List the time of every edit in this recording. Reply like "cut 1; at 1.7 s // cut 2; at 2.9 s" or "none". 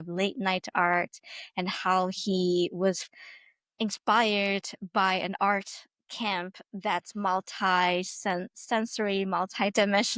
cut 1; at 3.0 s